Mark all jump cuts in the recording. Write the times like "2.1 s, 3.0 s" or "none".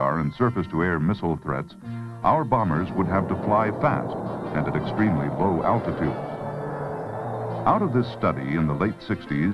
none